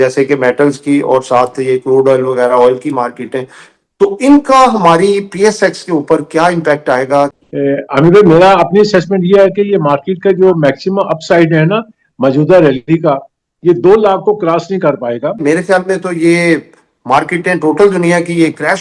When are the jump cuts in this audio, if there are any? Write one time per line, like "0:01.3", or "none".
0:07.3
0:15.4